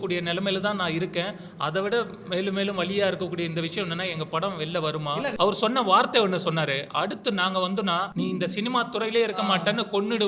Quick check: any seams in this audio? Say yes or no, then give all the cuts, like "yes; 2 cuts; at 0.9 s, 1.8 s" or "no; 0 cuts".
yes; 2 cuts; at 5.3 s, 8.1 s